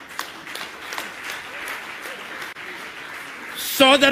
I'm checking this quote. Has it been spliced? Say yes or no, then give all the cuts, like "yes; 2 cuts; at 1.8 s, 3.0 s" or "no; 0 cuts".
no; 0 cuts